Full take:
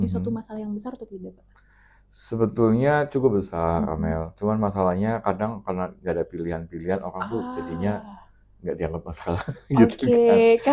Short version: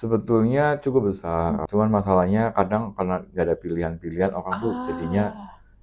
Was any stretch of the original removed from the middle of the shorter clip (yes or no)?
yes